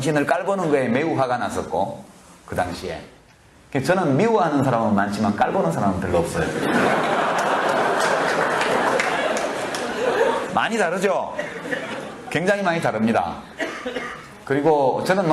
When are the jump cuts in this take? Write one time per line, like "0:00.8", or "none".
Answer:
none